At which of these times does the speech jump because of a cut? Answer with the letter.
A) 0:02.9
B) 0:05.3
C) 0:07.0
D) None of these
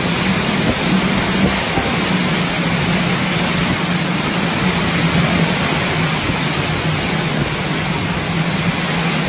D